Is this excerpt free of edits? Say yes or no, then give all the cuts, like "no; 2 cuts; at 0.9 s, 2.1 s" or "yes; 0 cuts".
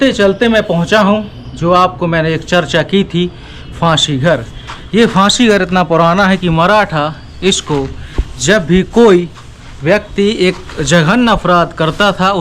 yes; 0 cuts